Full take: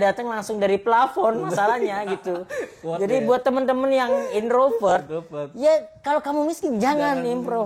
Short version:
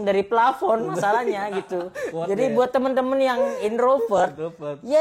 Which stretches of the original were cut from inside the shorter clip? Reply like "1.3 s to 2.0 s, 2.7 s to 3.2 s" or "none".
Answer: 2.6 s to 2.8 s